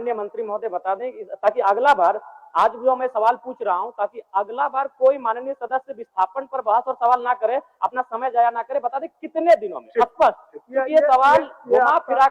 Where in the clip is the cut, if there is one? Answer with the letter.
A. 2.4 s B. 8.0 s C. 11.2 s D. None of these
D